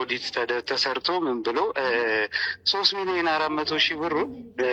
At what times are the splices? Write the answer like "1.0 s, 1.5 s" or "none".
none

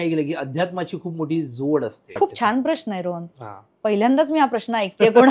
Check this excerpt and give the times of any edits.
2.2 s

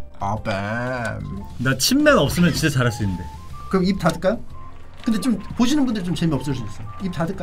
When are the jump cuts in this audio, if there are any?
1.4 s

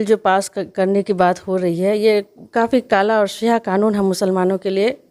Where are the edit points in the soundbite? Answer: none

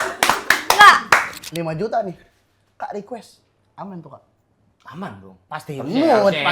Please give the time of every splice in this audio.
1.4 s

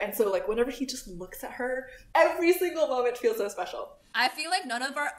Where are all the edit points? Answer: 2.1 s, 3.5 s

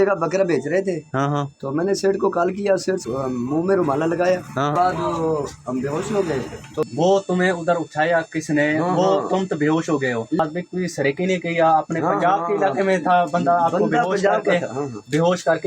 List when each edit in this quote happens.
3.0 s, 4.7 s, 6.9 s, 10.4 s

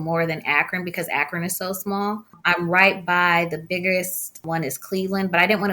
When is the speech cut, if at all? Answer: 2.4 s, 4.4 s

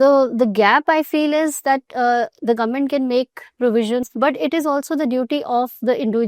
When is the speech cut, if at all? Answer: 4.1 s

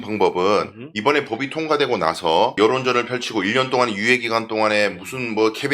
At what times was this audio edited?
2.6 s

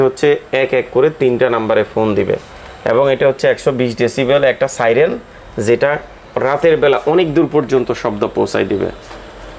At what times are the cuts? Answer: none

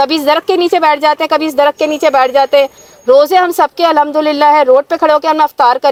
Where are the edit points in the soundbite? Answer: none

